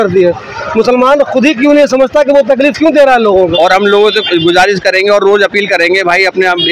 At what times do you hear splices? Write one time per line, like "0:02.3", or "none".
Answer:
0:03.5